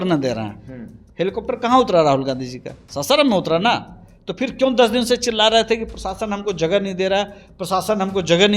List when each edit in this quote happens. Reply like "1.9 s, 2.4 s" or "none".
none